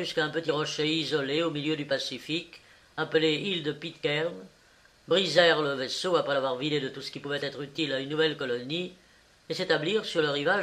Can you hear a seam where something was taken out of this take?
no; 0 cuts

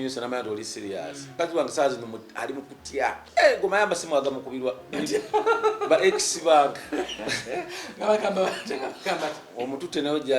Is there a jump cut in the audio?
yes; 2 cuts; at 1.3 s, 3.2 s

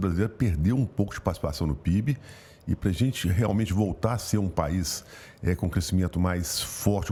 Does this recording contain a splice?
no; 0 cuts

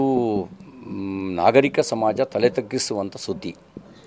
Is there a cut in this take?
no; 0 cuts

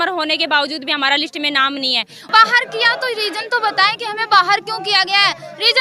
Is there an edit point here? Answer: yes; 1 cut; at 2.2 s

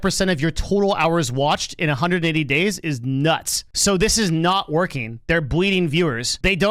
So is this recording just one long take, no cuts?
yes; 0 cuts

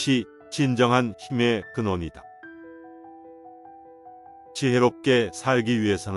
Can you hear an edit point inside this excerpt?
no; 0 cuts

